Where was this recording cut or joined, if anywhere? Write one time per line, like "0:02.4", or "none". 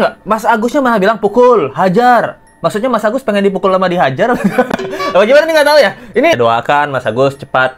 0:06.3